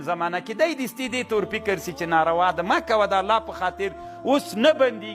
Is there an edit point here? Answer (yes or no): no